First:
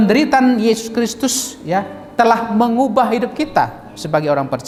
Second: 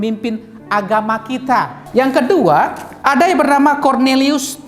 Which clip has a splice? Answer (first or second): second